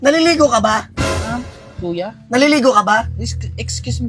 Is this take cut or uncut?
uncut